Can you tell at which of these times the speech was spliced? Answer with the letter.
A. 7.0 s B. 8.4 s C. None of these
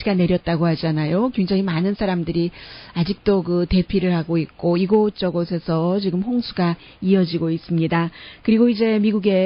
B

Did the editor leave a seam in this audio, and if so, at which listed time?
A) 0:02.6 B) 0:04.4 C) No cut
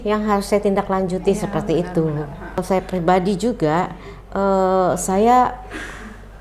A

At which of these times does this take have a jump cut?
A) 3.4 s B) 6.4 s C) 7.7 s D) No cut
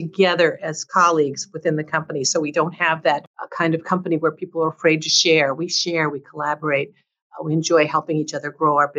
A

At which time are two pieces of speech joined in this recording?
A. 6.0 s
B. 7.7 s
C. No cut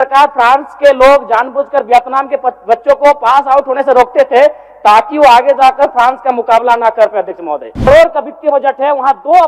B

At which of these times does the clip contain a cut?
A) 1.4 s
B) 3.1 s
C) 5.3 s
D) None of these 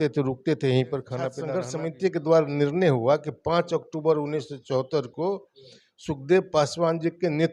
A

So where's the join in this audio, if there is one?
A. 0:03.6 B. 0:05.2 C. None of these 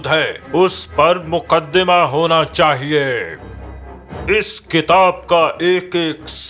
A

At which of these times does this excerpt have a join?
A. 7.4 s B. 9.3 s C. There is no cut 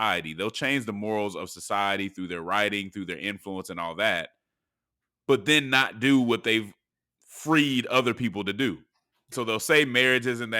B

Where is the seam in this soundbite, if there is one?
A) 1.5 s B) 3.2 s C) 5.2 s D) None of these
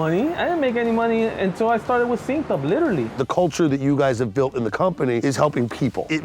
B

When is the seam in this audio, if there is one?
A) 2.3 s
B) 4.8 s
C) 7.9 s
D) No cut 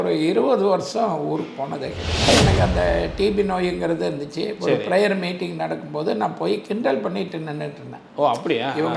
A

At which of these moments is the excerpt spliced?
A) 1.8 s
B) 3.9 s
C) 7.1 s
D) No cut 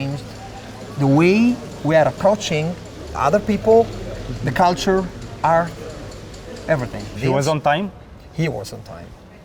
C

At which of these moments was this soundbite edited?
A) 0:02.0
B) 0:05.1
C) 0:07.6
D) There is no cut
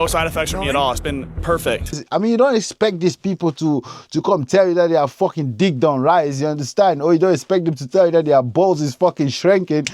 A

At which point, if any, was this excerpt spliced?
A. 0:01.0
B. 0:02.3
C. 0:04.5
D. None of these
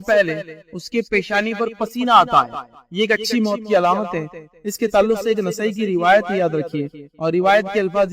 D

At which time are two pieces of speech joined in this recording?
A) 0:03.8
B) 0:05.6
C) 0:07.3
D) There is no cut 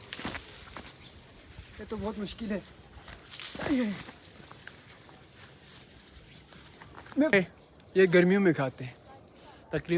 C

